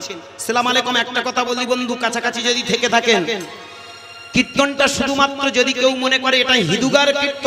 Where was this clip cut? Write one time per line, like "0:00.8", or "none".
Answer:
none

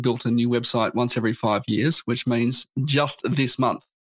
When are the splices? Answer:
none

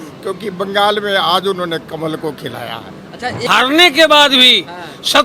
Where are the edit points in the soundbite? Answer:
0:03.4

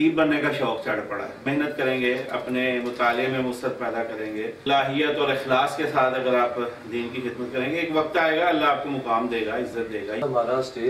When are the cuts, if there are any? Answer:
0:01.4
0:04.6
0:10.2

